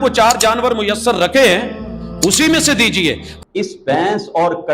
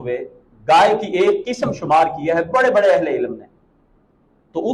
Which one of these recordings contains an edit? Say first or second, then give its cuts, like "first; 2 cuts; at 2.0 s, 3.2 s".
first; 1 cut; at 3.3 s